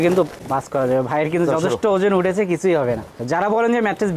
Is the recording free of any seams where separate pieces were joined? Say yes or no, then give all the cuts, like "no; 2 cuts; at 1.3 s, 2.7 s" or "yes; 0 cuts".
yes; 0 cuts